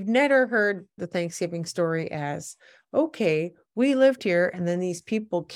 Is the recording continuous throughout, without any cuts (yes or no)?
no